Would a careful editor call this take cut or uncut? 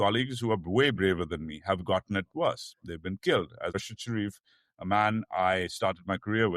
cut